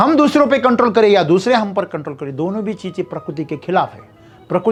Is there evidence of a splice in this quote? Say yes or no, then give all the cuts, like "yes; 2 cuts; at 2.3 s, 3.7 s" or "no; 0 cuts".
no; 0 cuts